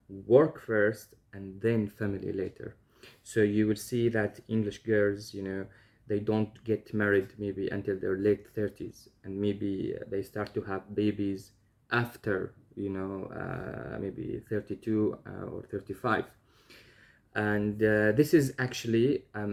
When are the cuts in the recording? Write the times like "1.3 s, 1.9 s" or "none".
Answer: none